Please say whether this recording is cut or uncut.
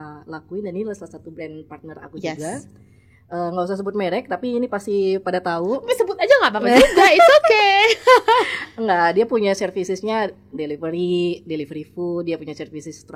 uncut